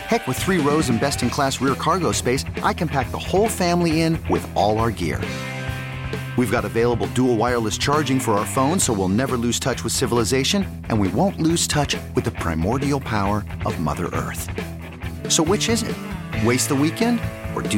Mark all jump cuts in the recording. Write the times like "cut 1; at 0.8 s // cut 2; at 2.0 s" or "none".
none